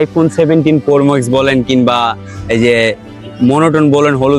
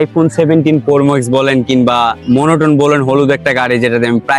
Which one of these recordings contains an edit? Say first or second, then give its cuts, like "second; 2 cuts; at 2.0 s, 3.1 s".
second; 1 cut; at 2.2 s